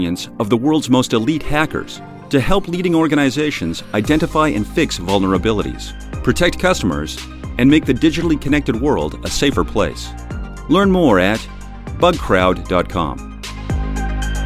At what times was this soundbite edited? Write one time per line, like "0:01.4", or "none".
0:13.4